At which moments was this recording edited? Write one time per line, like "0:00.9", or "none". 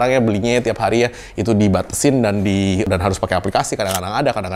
none